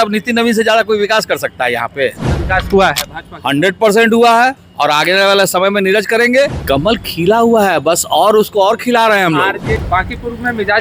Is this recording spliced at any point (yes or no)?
yes